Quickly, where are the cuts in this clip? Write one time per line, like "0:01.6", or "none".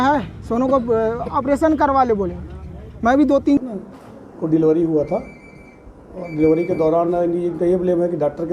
0:03.6